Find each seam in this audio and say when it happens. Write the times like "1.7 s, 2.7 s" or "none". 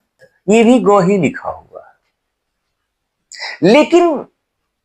none